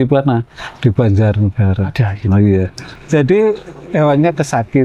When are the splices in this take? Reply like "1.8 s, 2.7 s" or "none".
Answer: 2.9 s